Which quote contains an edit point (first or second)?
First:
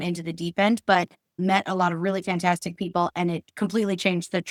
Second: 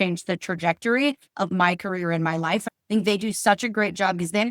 second